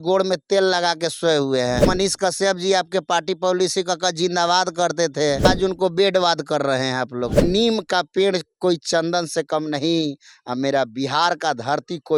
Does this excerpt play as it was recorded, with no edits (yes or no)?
no